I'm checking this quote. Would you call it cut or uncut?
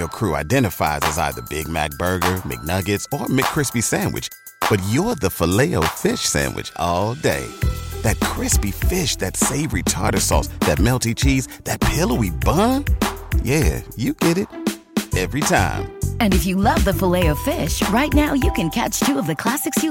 uncut